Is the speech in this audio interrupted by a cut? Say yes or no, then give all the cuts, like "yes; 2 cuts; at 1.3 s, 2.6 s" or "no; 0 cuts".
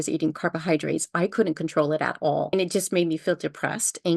yes; 1 cut; at 2.5 s